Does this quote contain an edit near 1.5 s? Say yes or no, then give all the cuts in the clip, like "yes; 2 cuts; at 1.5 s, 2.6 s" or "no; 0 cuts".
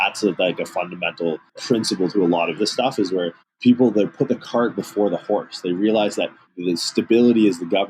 yes; 1 cut; at 1.5 s